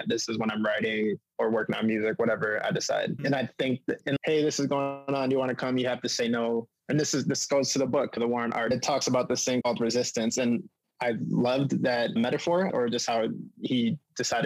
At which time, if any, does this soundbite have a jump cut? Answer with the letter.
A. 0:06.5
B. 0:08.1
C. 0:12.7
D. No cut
C